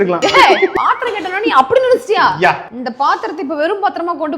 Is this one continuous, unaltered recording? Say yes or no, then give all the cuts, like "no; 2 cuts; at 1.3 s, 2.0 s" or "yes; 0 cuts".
no; 2 cuts; at 0.7 s, 2.8 s